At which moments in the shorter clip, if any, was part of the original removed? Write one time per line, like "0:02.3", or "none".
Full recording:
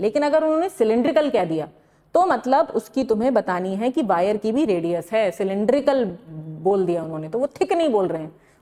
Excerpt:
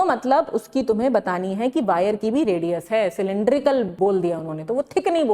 0:03.9